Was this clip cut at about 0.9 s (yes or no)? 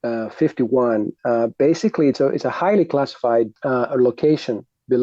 no